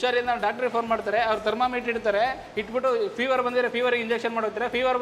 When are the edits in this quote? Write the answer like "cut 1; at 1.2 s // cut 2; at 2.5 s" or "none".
none